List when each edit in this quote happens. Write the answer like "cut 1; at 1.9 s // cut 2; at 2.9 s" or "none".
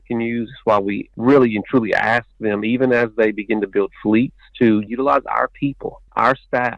cut 1; at 4.8 s